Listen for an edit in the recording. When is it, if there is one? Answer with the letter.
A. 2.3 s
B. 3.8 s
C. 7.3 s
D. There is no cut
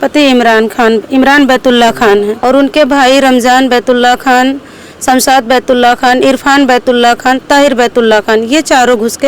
A